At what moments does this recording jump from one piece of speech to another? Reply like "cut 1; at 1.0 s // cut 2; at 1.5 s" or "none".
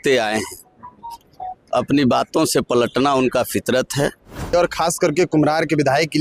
cut 1; at 4.5 s